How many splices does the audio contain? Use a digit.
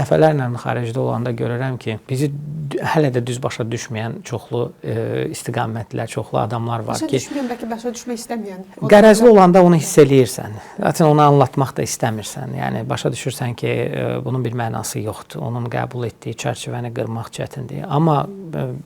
0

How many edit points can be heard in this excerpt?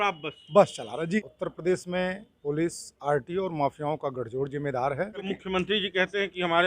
2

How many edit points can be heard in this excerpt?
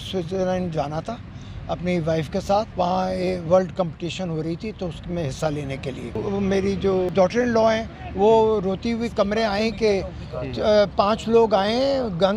3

